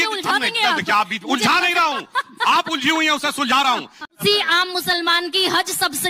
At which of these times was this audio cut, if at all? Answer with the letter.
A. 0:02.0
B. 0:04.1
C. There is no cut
B